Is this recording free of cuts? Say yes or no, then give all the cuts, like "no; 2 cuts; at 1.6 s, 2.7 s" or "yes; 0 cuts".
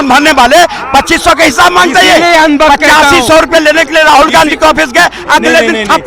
yes; 0 cuts